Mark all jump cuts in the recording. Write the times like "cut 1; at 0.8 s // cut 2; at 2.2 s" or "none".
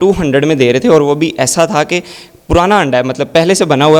none